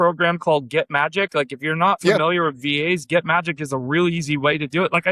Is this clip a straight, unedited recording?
yes; 0 cuts

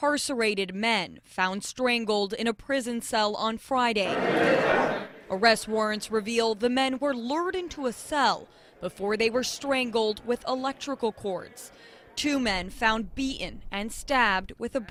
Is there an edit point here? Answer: no; 0 cuts

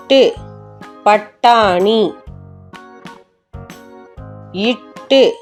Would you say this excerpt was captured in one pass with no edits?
yes; 0 cuts

